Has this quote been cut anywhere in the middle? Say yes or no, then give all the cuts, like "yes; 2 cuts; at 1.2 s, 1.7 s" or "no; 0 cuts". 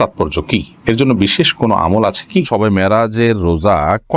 yes; 1 cut; at 2.5 s